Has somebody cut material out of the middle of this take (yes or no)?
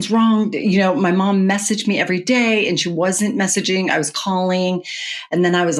no